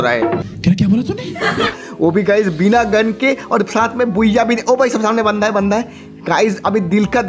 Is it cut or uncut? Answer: cut